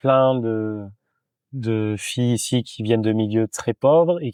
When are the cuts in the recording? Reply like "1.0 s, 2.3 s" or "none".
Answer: none